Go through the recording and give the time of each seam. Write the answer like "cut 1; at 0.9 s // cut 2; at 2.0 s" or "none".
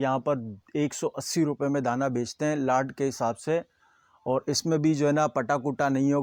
none